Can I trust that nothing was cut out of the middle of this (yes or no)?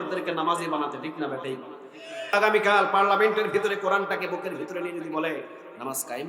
no